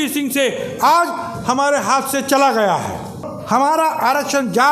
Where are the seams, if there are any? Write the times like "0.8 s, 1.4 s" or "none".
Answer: 3.3 s